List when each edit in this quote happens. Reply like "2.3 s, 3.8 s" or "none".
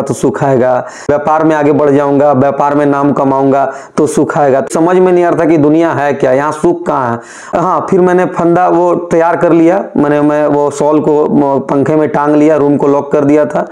4.7 s, 7.5 s